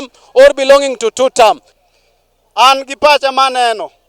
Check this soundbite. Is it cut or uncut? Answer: cut